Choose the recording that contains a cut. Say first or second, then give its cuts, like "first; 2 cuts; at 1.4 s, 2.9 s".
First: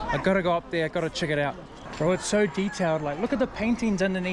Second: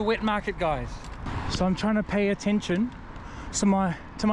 second; 1 cut; at 1.3 s